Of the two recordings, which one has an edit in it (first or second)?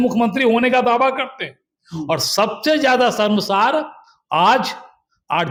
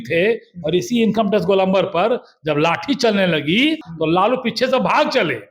second